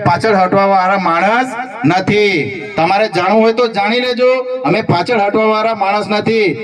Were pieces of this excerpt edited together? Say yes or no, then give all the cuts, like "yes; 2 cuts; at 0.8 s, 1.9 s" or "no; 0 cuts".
no; 0 cuts